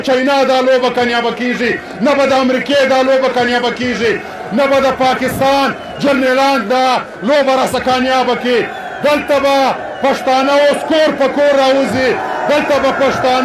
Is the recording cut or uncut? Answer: uncut